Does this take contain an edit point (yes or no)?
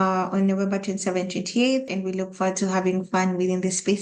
yes